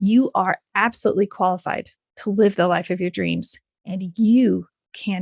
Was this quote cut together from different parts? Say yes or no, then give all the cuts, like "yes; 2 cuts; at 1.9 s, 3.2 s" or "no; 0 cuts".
no; 0 cuts